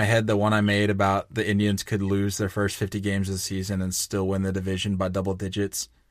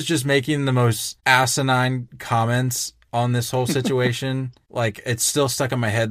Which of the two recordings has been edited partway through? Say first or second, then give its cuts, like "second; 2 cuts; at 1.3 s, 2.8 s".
second; 3 cuts; at 1.1 s, 2.1 s, 4.6 s